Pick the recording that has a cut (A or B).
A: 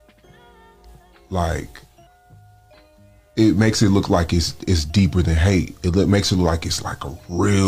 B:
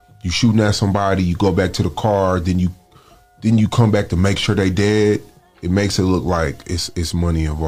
A